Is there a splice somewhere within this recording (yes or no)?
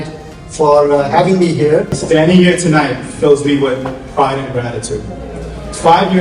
yes